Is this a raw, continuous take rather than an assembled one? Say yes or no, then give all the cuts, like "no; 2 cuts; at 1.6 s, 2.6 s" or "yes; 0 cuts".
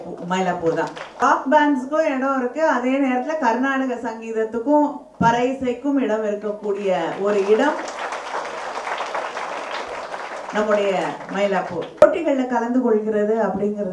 no; 2 cuts; at 1.2 s, 12.0 s